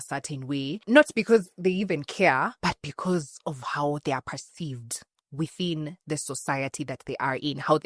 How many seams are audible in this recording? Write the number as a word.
two